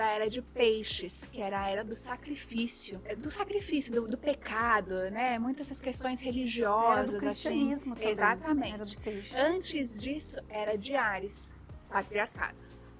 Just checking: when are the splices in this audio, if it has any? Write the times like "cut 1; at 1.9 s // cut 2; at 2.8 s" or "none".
cut 1; at 2.9 s